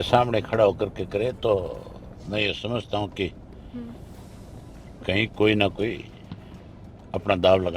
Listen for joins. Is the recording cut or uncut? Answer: uncut